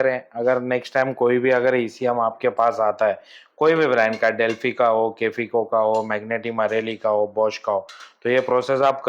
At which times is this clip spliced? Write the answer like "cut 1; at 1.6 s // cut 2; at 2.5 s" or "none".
none